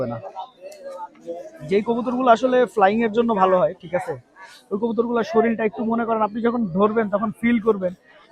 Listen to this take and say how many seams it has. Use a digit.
1